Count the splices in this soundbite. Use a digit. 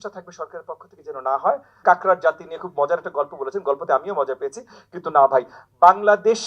1